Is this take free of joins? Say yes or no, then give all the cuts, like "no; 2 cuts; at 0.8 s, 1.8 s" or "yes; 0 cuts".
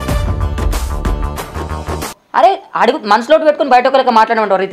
yes; 0 cuts